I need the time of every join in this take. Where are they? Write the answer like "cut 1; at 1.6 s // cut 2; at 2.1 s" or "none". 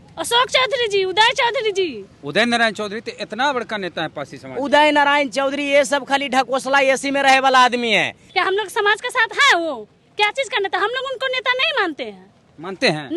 cut 1; at 2.1 s // cut 2; at 8.2 s